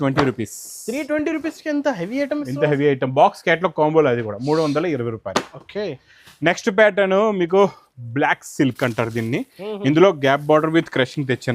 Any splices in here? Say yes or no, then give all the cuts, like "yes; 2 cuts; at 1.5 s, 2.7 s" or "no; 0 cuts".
no; 0 cuts